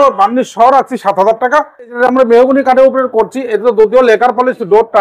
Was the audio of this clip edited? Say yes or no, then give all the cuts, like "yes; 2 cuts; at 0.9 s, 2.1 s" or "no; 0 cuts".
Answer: yes; 1 cut; at 1.9 s